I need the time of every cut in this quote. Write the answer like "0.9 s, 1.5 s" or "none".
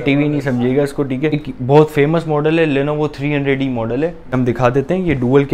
1.3 s, 4.3 s

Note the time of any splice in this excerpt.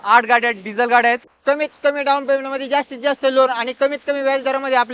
1.3 s

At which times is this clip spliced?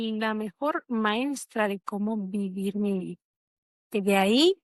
none

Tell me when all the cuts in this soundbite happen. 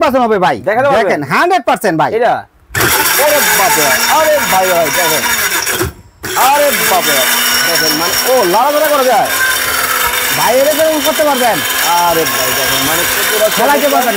none

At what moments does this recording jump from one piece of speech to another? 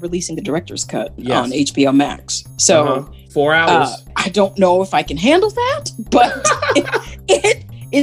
1.2 s, 4.2 s

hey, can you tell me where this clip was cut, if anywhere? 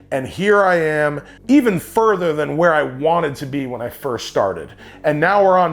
1.3 s, 4.9 s

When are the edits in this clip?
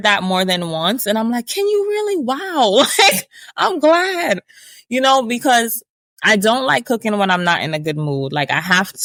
none

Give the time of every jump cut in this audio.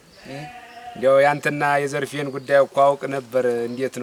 none

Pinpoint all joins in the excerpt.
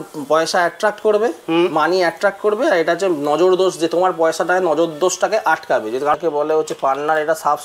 6.2 s

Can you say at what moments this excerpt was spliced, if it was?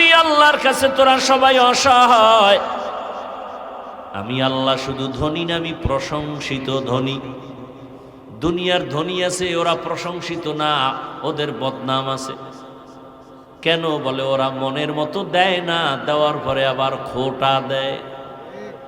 none

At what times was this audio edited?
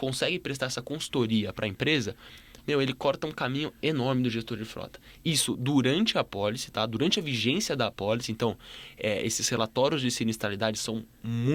none

